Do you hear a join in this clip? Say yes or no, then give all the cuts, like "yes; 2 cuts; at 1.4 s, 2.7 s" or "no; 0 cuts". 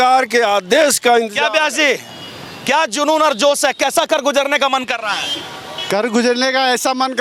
no; 0 cuts